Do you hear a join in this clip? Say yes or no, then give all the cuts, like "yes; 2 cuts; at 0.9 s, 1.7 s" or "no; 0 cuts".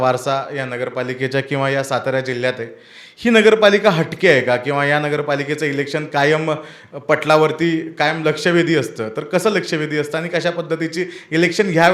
no; 0 cuts